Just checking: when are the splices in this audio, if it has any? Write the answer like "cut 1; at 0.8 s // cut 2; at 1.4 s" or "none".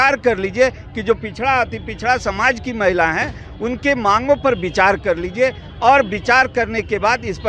none